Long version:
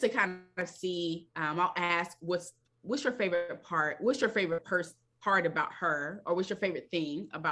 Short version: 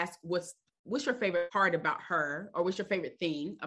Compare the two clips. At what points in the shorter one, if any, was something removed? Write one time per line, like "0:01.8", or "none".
0:01.5

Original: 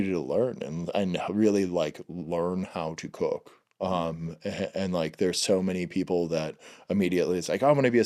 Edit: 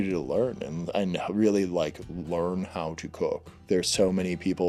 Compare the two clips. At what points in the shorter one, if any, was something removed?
0:03.6

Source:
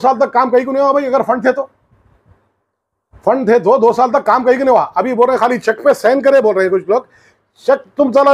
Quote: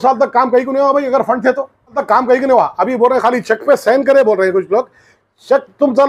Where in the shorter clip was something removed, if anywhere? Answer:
0:02.0

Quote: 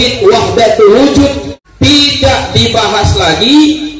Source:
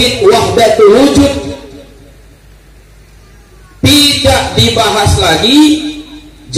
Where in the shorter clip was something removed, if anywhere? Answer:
0:01.6

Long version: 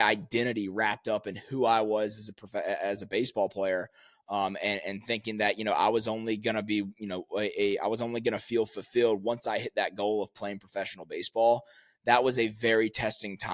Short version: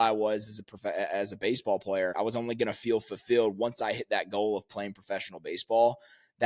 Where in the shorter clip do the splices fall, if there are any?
0:02.1

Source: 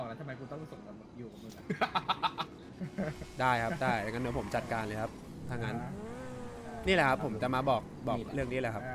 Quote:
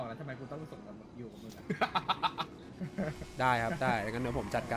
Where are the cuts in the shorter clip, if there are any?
none

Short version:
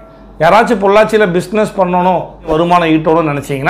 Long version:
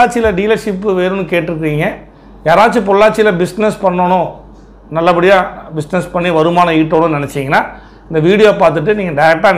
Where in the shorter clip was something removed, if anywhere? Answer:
0:02.4

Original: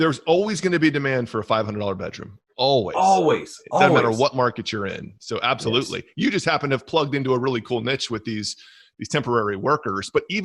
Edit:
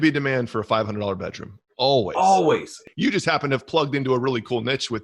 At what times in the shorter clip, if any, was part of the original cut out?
0:02.8

